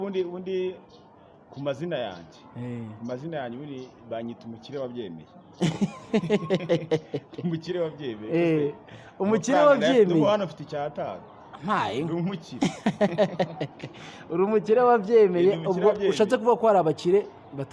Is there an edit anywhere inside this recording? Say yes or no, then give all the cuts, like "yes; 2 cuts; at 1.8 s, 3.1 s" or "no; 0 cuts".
no; 0 cuts